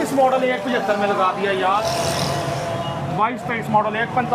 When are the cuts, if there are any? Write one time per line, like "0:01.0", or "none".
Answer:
0:01.8

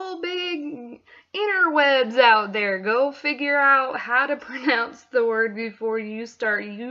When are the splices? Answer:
none

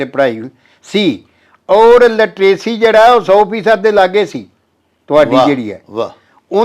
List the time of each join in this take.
none

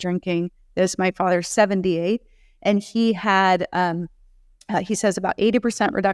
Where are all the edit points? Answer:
none

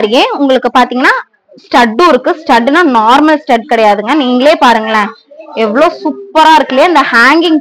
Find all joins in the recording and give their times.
none

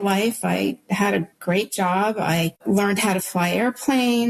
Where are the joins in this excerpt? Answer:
0:02.6

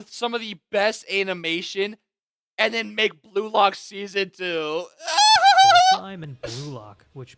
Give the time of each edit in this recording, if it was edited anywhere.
none

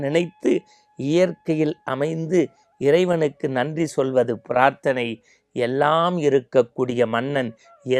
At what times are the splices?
none

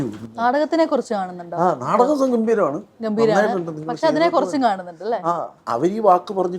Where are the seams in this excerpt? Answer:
0:05.5

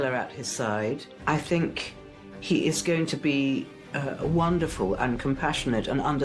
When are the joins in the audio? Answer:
0:01.1

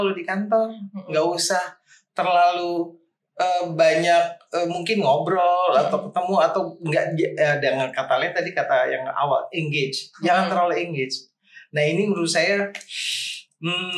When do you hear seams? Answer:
none

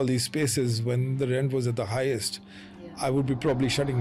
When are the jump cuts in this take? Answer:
none

